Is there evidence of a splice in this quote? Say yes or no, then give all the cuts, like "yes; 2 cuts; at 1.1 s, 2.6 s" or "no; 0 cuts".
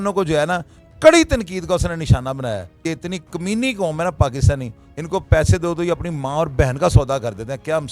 yes; 1 cut; at 2.8 s